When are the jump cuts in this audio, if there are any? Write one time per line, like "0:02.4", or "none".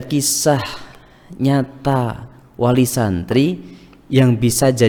none